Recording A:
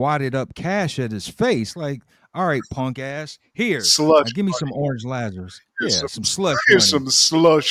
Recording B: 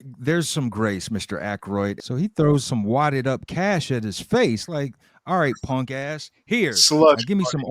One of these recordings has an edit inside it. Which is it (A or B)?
B